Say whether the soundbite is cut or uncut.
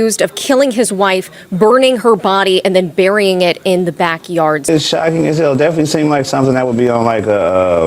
cut